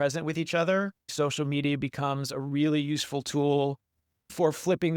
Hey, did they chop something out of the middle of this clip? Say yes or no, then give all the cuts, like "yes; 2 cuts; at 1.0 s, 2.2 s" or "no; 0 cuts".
yes; 1 cut; at 1.0 s